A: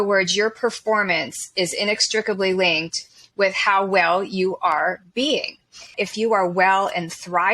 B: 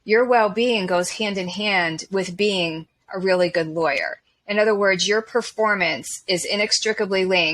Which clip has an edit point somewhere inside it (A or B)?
A